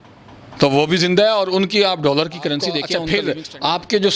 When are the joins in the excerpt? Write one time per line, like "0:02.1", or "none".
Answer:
0:02.9